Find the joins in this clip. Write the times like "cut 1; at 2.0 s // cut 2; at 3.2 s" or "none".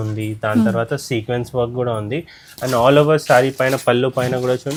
none